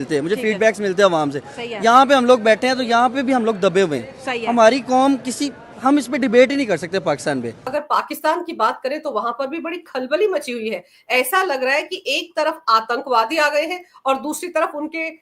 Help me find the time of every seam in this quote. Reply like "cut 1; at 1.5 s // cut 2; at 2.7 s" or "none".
cut 1; at 7.6 s

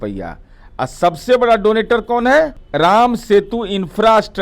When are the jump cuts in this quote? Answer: cut 1; at 2.6 s

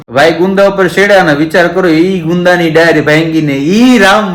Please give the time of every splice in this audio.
none

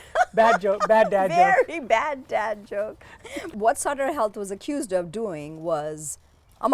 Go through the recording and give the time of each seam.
cut 1; at 3.5 s

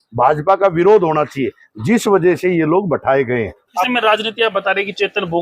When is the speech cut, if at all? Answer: cut 1; at 3.9 s

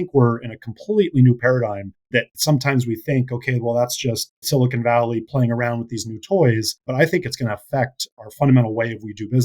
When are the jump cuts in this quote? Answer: cut 1; at 6.8 s

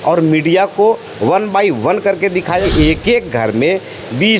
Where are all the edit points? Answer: cut 1; at 2.6 s

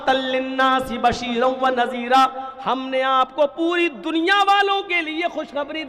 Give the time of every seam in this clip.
none

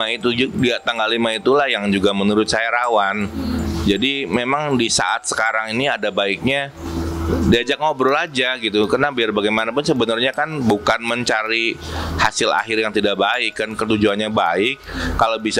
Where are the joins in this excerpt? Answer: none

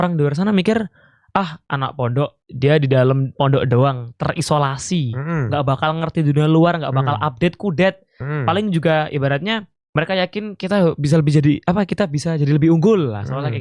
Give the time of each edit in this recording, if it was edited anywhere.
none

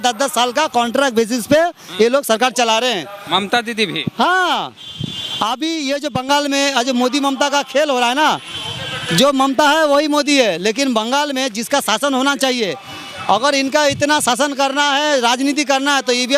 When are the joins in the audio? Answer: none

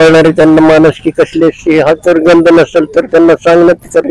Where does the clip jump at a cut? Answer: none

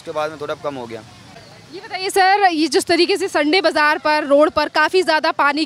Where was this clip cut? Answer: none

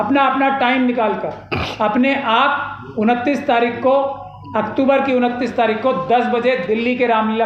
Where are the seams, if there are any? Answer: none

